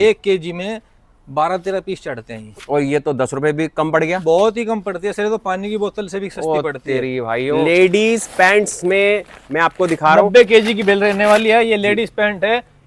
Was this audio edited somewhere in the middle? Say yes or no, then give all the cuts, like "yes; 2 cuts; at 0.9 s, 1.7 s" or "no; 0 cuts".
yes; 1 cut; at 7.6 s